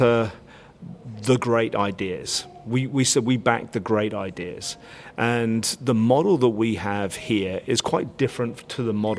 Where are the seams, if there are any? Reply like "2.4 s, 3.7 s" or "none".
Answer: none